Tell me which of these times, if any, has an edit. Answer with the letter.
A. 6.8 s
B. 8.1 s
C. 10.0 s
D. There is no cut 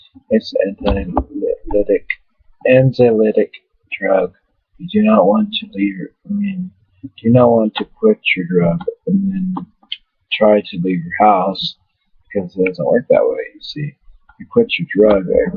B